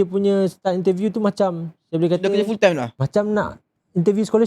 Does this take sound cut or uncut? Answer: cut